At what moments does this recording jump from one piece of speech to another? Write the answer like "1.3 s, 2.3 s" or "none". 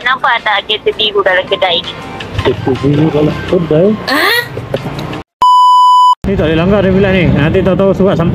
5.2 s, 6.1 s